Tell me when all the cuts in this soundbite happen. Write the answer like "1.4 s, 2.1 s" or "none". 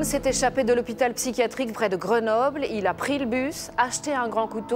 1.7 s